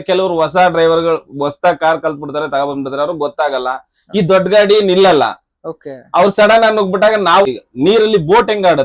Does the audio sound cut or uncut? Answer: cut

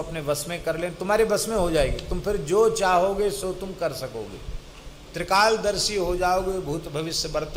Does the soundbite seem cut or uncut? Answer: uncut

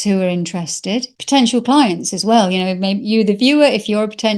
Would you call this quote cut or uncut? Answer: cut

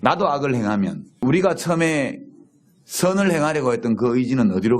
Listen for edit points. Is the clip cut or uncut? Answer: cut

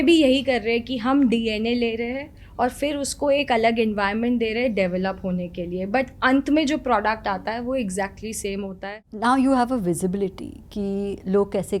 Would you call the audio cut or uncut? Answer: uncut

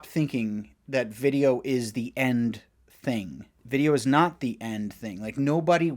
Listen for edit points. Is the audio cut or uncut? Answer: cut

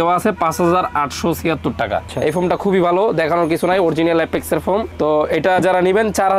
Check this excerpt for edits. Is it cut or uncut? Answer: cut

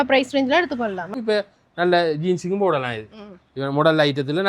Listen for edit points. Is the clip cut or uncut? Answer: cut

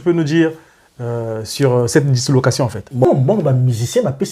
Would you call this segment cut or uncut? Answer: cut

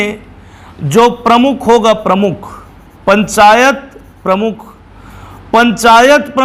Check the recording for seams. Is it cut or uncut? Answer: uncut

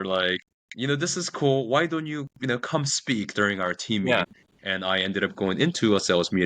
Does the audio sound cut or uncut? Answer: cut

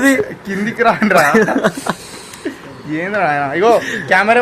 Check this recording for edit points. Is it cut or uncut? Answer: uncut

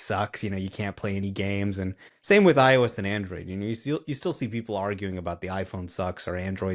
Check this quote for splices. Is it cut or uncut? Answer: cut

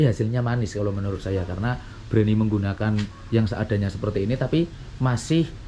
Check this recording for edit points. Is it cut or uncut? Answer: uncut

